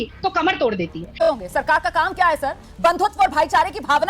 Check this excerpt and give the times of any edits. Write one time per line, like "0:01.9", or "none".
0:01.2